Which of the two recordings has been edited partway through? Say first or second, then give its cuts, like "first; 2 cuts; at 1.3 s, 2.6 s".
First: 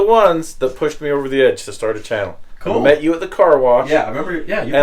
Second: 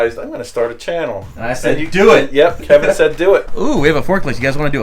second; 1 cut; at 3.5 s